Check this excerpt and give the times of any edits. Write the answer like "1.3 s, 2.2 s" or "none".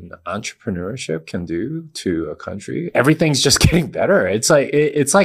2.9 s